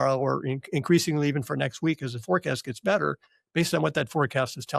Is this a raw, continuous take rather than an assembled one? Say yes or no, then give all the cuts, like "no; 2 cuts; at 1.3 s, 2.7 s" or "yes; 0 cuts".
yes; 0 cuts